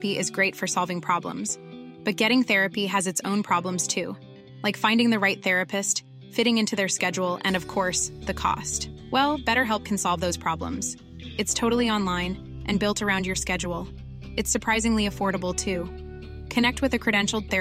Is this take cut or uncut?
uncut